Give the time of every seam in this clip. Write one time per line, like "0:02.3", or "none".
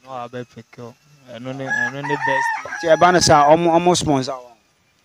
none